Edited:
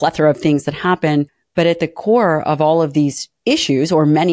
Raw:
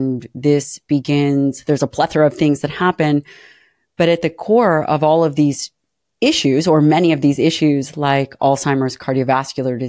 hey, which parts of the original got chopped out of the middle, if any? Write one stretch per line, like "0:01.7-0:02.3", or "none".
0:03.4-0:03.8
0:05.7-0:06.0